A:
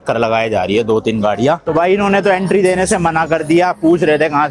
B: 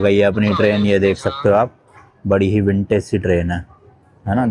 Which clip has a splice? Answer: A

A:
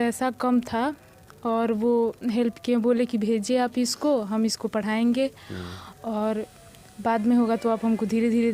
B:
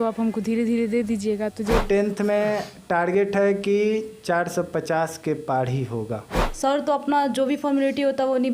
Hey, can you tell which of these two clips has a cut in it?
B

